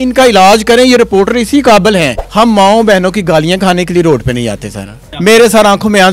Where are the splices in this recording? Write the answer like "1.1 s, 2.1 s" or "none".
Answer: 2.2 s, 5.1 s